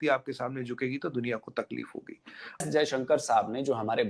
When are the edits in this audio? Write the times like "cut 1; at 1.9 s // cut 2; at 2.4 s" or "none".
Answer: cut 1; at 2.7 s